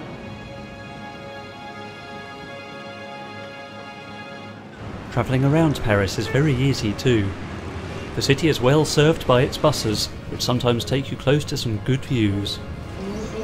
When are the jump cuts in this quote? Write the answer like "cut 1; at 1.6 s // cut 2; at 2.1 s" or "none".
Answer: none

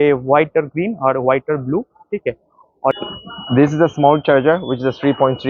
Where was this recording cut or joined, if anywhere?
cut 1; at 2.9 s

